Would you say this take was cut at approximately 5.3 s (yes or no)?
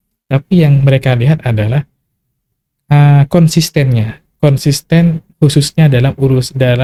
no